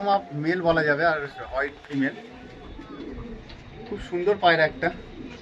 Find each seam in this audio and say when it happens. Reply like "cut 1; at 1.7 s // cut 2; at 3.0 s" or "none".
none